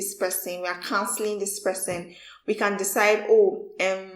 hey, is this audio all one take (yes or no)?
yes